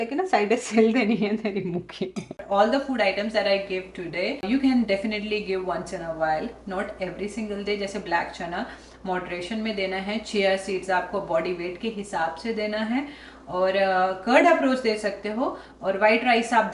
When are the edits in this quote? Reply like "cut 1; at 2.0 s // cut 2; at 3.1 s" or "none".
cut 1; at 2.4 s // cut 2; at 4.4 s